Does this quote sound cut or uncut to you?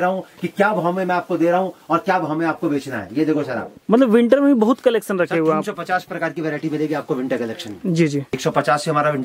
cut